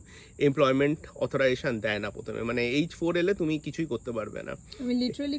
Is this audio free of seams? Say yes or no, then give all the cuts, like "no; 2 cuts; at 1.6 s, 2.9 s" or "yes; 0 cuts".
yes; 0 cuts